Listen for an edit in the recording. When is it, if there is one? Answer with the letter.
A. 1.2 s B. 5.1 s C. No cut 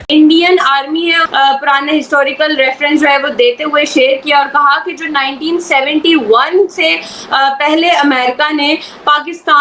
A